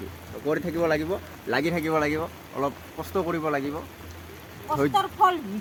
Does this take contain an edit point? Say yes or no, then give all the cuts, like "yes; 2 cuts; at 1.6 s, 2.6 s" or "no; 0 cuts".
no; 0 cuts